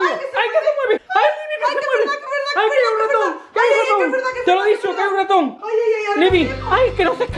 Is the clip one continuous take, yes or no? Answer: yes